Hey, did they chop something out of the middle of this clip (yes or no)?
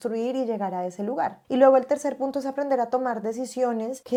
no